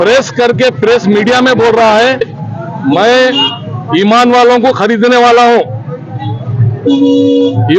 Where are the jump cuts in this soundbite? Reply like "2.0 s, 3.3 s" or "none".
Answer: 2.4 s